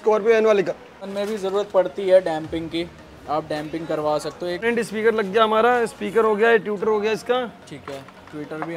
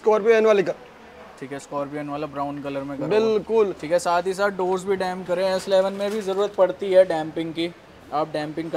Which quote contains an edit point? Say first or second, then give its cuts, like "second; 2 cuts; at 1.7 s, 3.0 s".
first; 2 cuts; at 1.1 s, 4.6 s